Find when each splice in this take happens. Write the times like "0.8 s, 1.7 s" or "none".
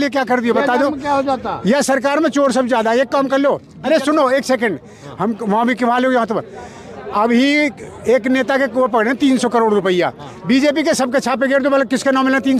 none